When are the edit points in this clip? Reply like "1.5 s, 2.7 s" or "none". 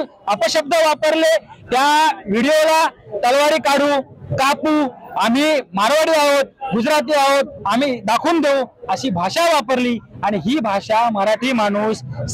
none